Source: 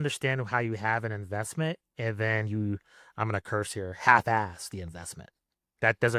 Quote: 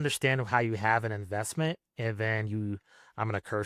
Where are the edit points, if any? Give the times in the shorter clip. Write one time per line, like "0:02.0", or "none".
none